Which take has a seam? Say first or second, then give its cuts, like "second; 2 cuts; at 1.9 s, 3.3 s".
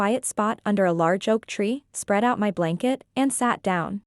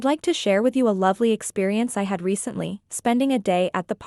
first; 1 cut; at 1.9 s